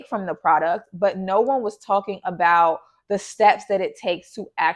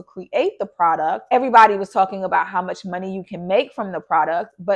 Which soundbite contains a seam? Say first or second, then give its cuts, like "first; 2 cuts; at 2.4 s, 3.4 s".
second; 1 cut; at 1.3 s